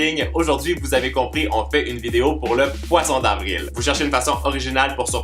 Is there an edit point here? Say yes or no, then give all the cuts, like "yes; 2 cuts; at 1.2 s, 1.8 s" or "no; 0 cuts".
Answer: yes; 1 cut; at 1.7 s